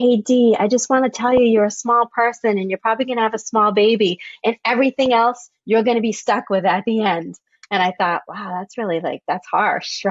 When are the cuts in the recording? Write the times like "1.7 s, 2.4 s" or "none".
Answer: none